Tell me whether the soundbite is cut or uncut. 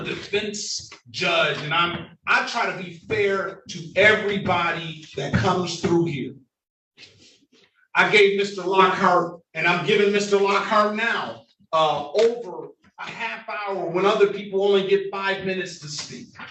uncut